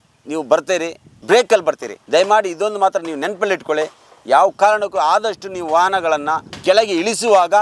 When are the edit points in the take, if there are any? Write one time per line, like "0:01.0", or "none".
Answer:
0:01.1
0:02.0
0:06.5

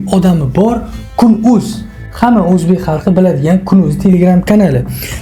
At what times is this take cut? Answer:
none

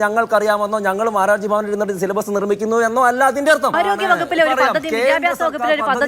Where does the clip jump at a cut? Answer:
0:03.7

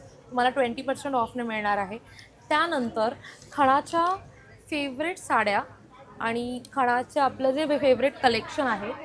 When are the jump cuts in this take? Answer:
none

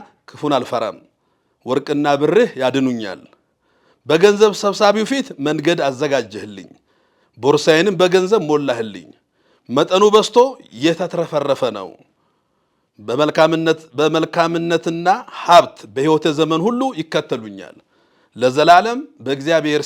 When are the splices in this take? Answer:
none

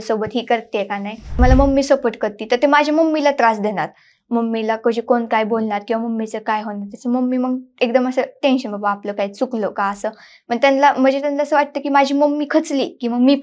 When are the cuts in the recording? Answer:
0:01.4

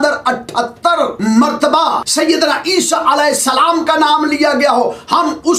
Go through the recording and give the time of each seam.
0:01.2
0:02.0

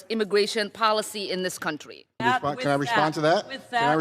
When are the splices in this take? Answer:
0:02.2

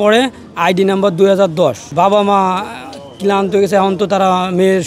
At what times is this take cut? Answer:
0:01.9

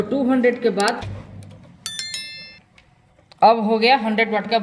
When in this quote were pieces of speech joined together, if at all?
0:01.0

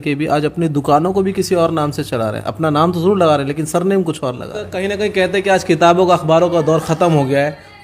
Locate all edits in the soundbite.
0:04.9

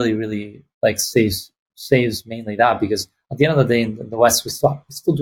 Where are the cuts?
none

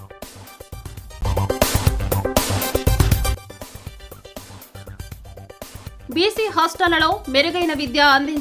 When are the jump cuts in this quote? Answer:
0:01.1
0:03.4
0:05.5

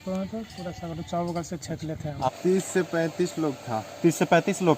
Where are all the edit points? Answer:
0:02.3

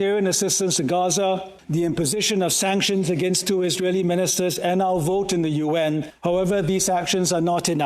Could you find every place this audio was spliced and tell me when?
0:06.1

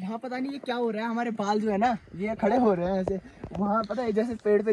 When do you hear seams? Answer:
none

